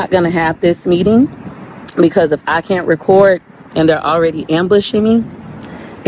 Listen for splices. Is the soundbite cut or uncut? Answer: uncut